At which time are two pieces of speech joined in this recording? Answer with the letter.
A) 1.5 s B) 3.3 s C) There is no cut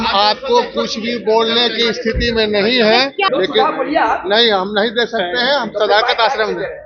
B